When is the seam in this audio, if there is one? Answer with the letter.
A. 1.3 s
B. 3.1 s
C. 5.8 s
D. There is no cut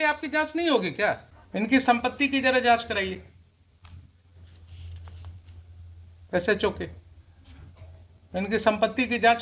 A